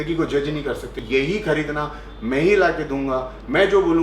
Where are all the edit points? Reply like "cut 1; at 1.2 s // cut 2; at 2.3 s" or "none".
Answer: cut 1; at 0.9 s